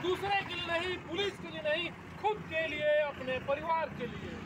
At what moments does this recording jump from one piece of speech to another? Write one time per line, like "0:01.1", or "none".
none